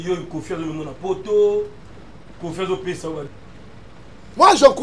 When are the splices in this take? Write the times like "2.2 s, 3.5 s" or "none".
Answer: 3.3 s